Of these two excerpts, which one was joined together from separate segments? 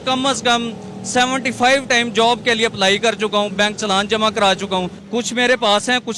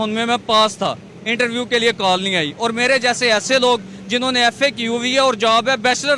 first; 1 cut; at 5.0 s

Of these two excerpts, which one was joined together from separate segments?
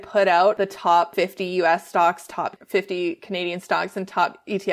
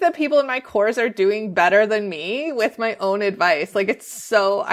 first; 2 cuts; at 1.0 s, 2.6 s

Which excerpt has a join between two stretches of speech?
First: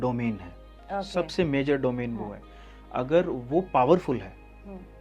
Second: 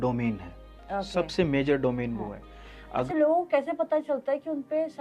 second; 1 cut; at 3.1 s

